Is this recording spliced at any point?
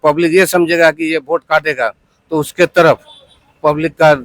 no; 0 cuts

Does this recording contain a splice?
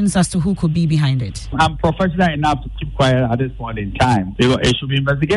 yes; 2 cuts; at 1.5 s, 4.3 s

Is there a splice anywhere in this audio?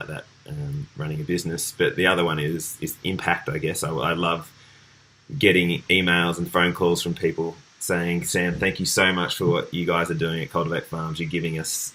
no; 0 cuts

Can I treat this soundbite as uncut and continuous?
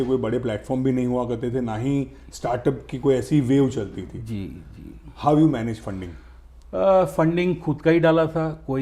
yes; 0 cuts

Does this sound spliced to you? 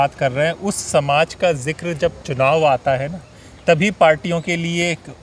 no; 0 cuts

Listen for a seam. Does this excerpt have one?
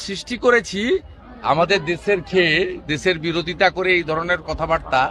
yes; 1 cut; at 1.2 s

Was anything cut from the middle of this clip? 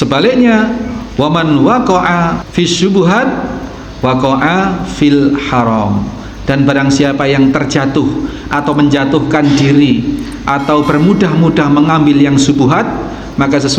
yes; 1 cut; at 2.4 s

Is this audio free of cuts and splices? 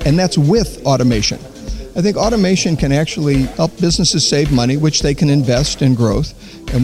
no; 1 cut; at 3.5 s

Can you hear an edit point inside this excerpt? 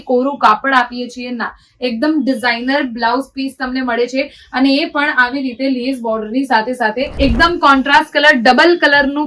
yes; 1 cut; at 7.1 s

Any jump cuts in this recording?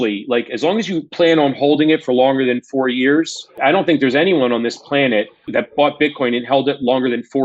yes; 2 cuts; at 3.5 s, 5.5 s

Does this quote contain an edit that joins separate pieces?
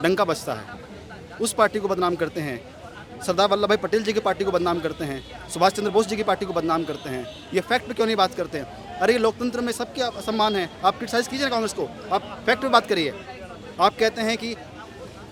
no; 0 cuts

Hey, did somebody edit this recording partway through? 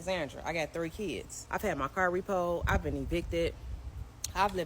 yes; 1 cut; at 1.3 s

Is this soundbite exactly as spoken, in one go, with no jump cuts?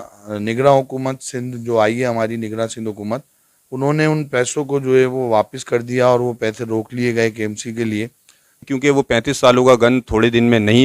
no; 1 cut; at 8.7 s

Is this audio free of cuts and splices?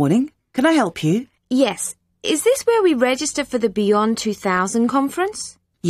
no; 1 cut; at 1.4 s

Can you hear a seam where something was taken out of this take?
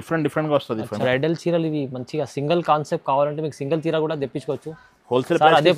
yes; 1 cut; at 1.0 s

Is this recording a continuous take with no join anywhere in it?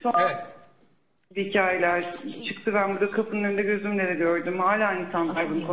yes; 0 cuts

